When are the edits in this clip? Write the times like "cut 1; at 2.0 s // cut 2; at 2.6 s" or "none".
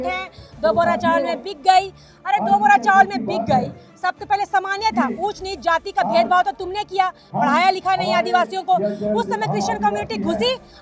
none